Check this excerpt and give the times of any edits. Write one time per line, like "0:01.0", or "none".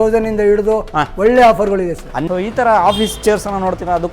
0:02.3